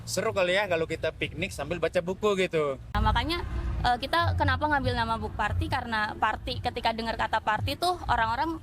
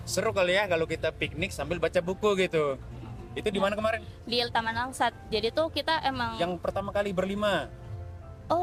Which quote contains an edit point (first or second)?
first